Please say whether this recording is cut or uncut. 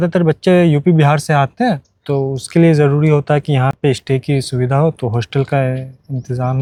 uncut